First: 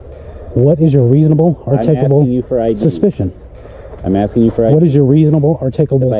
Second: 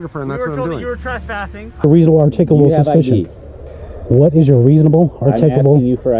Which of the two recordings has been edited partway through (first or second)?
second